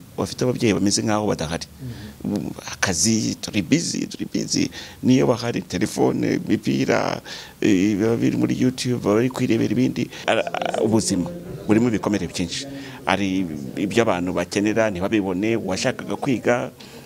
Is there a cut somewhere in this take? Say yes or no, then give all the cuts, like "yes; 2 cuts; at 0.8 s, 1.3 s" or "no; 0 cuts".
yes; 1 cut; at 10.2 s